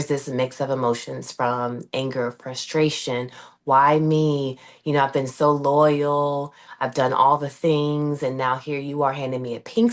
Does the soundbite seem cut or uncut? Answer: uncut